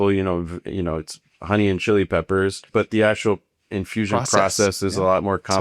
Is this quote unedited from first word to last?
no; 1 cut; at 2.6 s

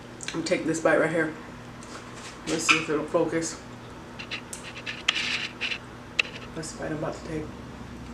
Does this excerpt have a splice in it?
no; 0 cuts

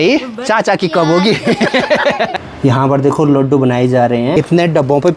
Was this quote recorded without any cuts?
no; 2 cuts; at 2.5 s, 4.3 s

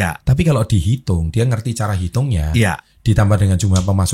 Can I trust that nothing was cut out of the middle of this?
yes; 0 cuts

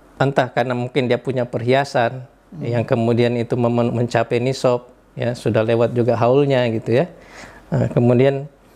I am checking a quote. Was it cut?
no; 0 cuts

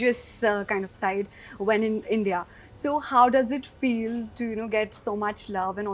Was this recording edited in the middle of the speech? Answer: no; 0 cuts

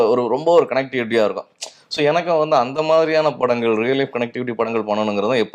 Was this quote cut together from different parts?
no; 0 cuts

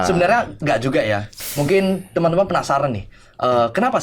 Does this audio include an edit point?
yes; 1 cut; at 1.3 s

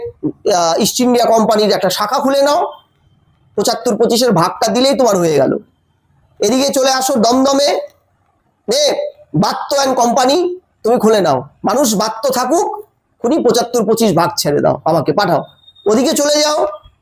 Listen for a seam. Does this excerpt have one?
no; 0 cuts

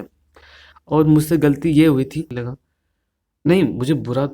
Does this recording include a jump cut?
yes; 1 cut; at 2.3 s

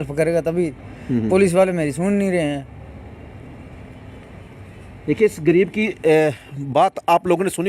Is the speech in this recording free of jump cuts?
yes; 0 cuts

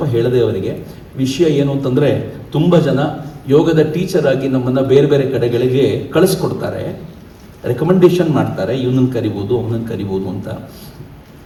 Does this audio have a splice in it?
no; 0 cuts

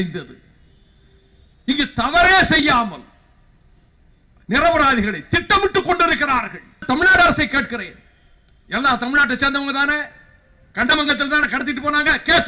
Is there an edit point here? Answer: yes; 1 cut; at 6.8 s

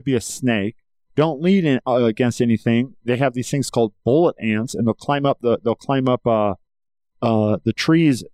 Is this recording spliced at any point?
no; 0 cuts

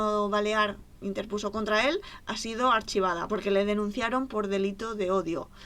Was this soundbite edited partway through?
yes; 1 cut; at 3.2 s

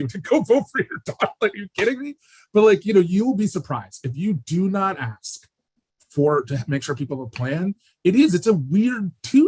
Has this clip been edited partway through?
no; 0 cuts

